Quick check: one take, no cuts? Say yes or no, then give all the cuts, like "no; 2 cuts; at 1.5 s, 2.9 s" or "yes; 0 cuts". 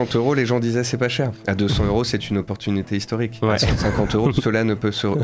yes; 0 cuts